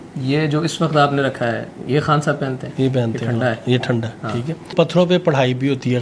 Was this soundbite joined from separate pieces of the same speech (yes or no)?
yes